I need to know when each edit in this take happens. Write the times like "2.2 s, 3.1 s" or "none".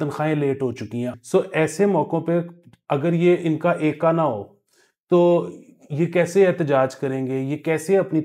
1.1 s